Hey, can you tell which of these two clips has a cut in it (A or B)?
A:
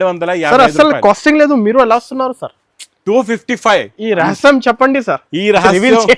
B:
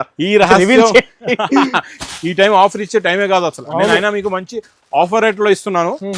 B